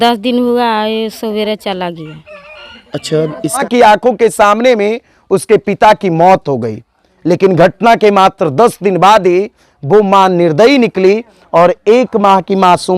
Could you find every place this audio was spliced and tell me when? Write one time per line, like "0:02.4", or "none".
0:03.6